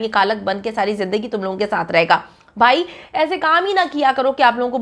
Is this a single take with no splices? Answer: yes; 0 cuts

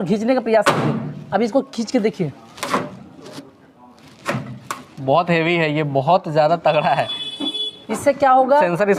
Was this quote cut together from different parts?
no; 0 cuts

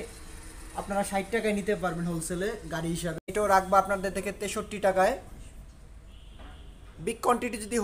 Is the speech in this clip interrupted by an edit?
yes; 1 cut; at 3.2 s

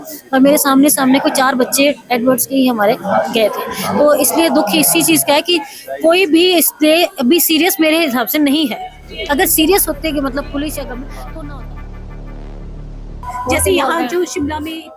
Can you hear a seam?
no; 0 cuts

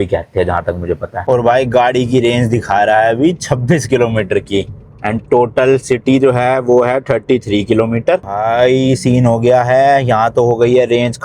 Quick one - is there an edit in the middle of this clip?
yes; 2 cuts; at 1.2 s, 8.3 s

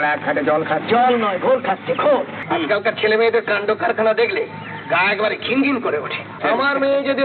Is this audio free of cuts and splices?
no; 2 cuts; at 2.4 s, 6.4 s

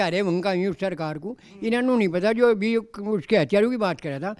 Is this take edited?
no; 0 cuts

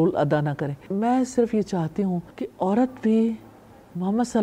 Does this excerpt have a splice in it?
yes; 2 cuts; at 0.8 s, 2.4 s

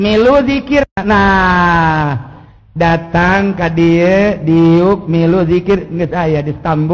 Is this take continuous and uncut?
no; 1 cut; at 1.0 s

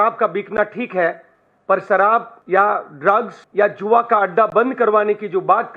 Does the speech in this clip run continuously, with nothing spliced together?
no; 2 cuts; at 2.4 s, 3.4 s

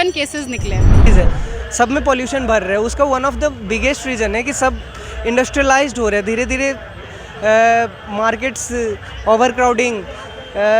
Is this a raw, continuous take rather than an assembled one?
no; 1 cut; at 1.1 s

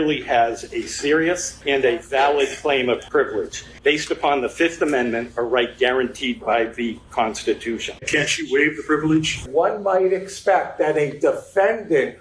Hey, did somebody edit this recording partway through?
yes; 4 cuts; at 1.5 s, 3.4 s, 8.0 s, 9.4 s

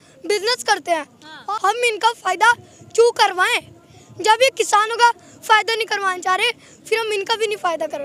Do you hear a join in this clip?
yes; 1 cut; at 1.3 s

